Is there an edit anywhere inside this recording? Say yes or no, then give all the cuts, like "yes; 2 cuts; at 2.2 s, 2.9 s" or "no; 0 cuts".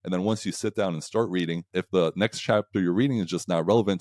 yes; 1 cut; at 1.6 s